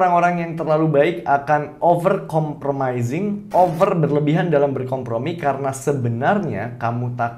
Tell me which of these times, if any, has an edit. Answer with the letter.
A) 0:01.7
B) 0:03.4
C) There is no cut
B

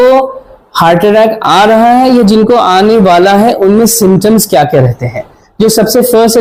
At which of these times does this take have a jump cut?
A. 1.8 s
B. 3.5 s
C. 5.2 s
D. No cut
D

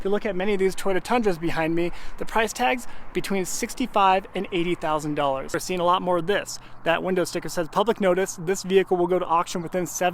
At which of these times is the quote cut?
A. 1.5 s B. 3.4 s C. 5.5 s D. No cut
C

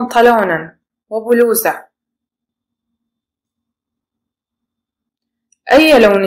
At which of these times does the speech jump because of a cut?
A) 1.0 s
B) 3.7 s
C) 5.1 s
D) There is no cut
D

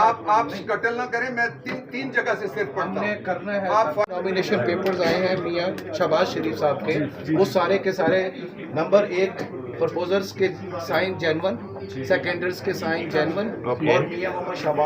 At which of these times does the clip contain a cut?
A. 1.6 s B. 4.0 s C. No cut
B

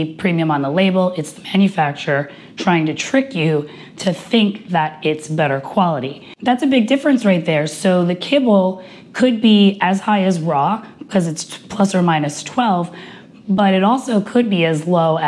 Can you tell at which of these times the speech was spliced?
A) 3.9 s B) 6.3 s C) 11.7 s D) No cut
B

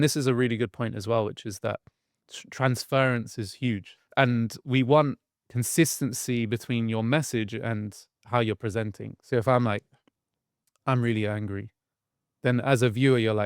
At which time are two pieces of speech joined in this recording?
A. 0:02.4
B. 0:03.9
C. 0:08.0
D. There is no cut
B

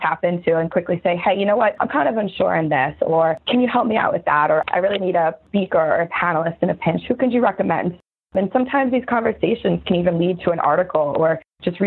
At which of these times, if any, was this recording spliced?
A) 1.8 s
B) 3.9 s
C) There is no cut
A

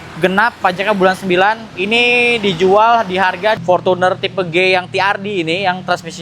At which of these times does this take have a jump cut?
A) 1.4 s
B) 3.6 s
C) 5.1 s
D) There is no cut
B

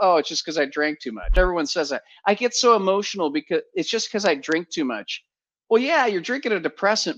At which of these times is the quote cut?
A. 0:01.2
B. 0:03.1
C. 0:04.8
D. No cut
A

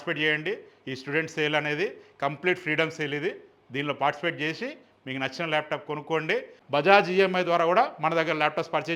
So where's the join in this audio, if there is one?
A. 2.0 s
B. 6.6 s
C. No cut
B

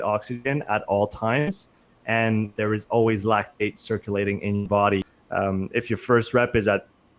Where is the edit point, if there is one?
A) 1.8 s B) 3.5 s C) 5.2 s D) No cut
C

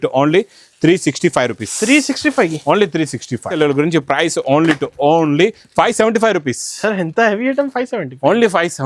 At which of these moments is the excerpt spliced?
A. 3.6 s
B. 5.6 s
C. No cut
A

